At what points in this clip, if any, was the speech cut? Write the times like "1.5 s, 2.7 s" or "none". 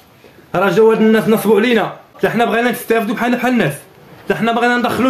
2.0 s